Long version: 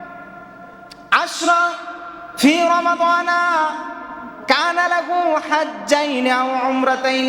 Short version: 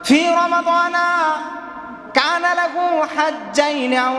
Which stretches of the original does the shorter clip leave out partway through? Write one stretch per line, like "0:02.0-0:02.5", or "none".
none